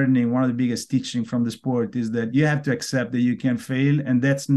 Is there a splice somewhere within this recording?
no; 0 cuts

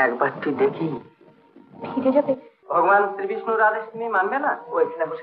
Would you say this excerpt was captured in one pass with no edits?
no; 1 cut; at 2.5 s

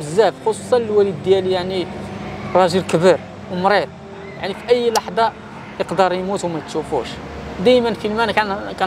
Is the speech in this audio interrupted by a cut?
no; 0 cuts

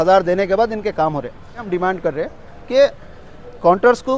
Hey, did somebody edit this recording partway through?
yes; 1 cut; at 1.7 s

